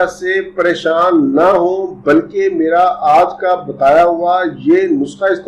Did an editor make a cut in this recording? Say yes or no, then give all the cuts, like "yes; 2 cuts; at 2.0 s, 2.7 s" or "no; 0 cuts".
no; 0 cuts